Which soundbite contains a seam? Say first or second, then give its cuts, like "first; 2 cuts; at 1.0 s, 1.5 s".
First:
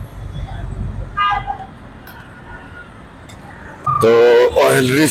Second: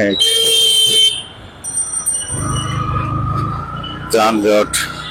first; 1 cut; at 3.9 s